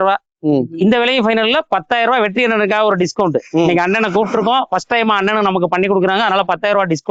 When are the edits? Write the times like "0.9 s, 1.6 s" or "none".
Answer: none